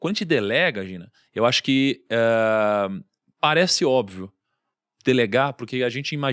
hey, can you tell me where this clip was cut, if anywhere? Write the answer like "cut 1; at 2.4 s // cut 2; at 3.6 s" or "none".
none